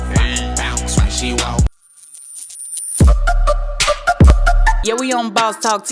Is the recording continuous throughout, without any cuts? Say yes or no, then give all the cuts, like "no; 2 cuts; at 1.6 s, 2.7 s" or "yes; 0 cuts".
no; 1 cut; at 1.7 s